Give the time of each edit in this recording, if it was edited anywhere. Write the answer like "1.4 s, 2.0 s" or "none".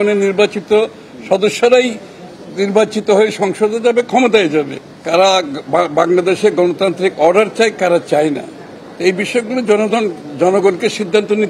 4.8 s